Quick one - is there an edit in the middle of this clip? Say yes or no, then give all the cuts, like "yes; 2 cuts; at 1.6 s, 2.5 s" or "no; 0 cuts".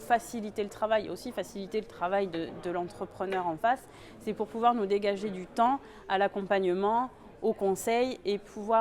no; 0 cuts